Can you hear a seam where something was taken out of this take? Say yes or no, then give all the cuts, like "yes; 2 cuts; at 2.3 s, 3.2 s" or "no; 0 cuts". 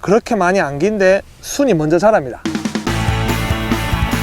yes; 1 cut; at 2.4 s